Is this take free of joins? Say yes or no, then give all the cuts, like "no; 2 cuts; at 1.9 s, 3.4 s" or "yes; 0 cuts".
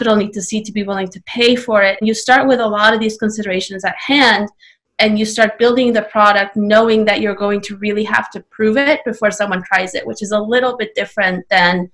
no; 1 cut; at 2.0 s